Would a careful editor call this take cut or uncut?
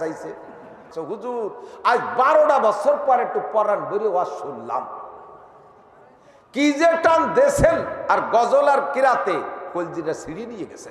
cut